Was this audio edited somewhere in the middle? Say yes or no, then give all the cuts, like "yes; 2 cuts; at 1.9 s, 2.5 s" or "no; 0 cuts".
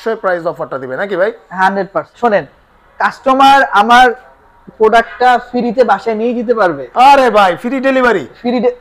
yes; 1 cut; at 2.1 s